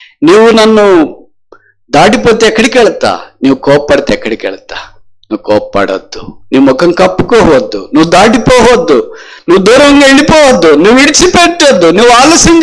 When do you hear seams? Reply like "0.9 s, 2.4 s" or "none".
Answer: none